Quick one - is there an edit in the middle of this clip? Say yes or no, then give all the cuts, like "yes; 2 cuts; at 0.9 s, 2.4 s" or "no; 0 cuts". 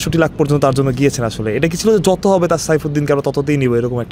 no; 0 cuts